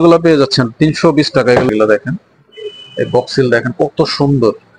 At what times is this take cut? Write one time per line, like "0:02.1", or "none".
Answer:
0:01.7